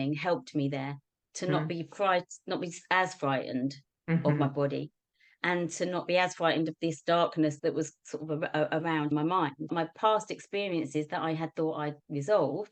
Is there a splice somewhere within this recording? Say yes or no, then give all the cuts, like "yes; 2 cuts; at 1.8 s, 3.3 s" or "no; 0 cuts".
no; 0 cuts